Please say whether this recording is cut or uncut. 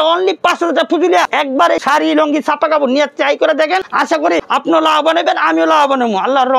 cut